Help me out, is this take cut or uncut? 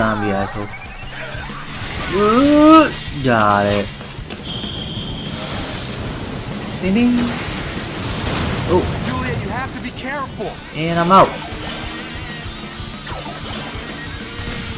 cut